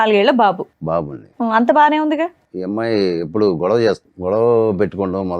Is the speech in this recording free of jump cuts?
no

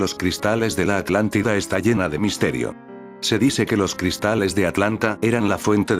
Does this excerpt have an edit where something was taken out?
yes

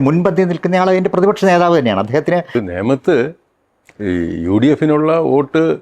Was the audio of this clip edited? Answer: yes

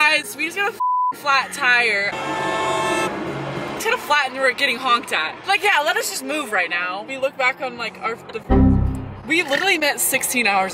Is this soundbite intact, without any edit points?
no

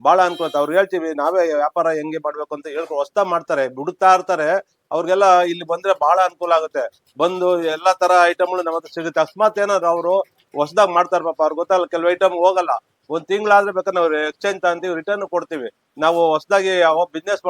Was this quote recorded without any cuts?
yes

